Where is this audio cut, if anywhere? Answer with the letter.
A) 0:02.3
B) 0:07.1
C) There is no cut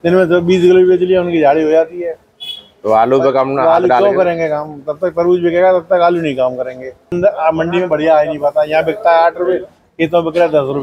B